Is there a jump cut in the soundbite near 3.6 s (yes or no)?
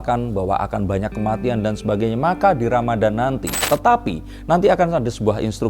yes